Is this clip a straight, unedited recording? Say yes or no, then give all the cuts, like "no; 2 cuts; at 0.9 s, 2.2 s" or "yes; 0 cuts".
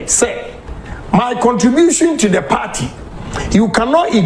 yes; 0 cuts